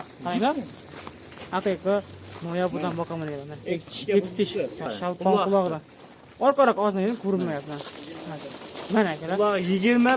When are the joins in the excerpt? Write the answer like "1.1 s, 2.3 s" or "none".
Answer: 4.9 s